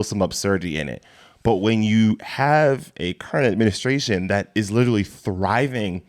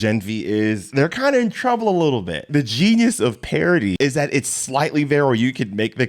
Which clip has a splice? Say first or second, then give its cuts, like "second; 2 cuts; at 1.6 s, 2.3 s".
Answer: second; 3 cuts; at 0.8 s, 2.5 s, 4.0 s